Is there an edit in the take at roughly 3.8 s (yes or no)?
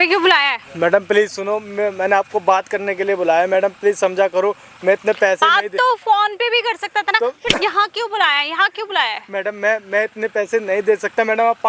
no